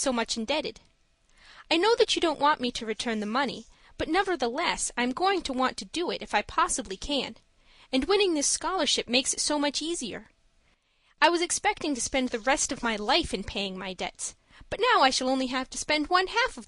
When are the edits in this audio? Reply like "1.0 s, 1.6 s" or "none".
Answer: 3.5 s